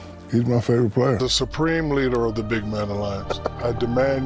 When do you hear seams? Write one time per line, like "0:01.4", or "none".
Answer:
0:01.2